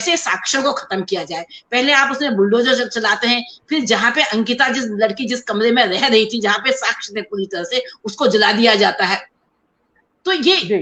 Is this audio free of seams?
yes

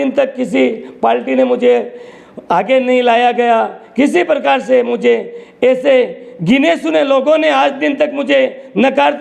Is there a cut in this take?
no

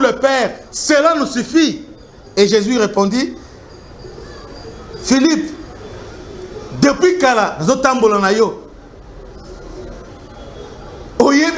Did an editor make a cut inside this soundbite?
no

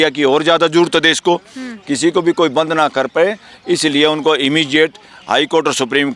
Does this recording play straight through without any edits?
yes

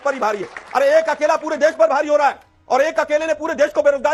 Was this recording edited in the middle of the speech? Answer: no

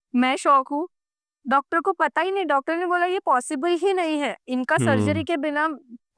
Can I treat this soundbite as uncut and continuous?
yes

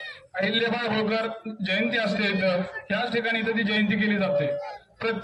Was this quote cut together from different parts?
no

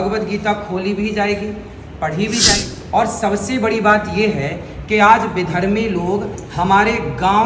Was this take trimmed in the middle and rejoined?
yes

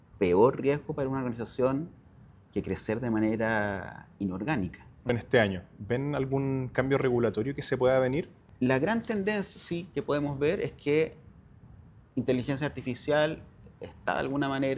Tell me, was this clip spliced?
yes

